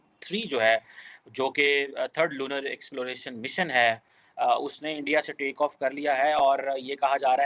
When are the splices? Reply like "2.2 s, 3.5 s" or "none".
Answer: none